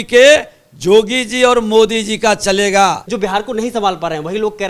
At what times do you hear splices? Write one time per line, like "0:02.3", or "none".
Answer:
0:03.1